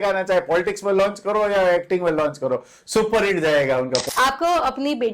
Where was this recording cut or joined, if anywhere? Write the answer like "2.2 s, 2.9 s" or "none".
4.0 s